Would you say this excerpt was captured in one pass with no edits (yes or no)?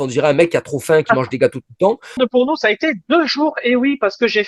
no